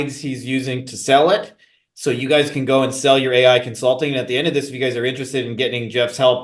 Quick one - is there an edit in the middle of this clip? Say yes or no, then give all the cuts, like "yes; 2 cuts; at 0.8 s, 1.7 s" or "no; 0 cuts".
no; 0 cuts